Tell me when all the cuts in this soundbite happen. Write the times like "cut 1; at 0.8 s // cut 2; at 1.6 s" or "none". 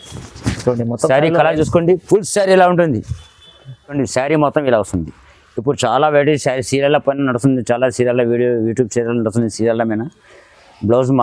cut 1; at 3.9 s